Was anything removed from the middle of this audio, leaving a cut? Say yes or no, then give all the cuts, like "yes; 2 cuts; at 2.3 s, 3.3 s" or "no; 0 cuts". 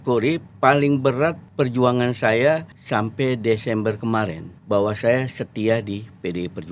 yes; 3 cuts; at 1.4 s, 2.7 s, 4.5 s